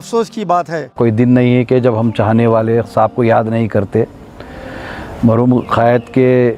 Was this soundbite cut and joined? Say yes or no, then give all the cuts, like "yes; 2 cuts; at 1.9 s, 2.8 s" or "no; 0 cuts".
yes; 1 cut; at 1.0 s